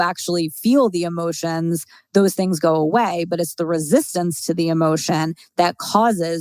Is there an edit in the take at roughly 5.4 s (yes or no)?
no